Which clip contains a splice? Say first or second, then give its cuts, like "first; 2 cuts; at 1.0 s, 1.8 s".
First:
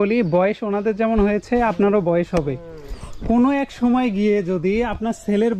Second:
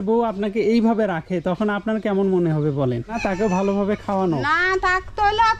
second; 1 cut; at 3.2 s